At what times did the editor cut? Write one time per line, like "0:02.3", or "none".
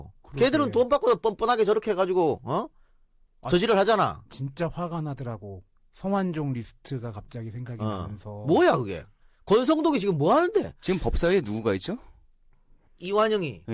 none